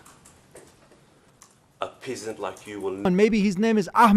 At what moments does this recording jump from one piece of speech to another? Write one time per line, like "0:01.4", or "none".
0:03.1